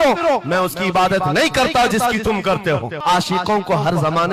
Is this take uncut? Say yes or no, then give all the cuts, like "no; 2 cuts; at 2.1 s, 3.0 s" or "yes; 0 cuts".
no; 1 cut; at 3.0 s